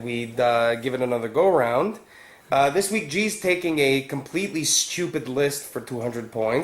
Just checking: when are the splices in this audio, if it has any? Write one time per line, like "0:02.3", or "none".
0:02.4